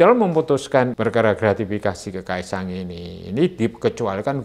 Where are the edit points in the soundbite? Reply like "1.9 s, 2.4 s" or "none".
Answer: 0.9 s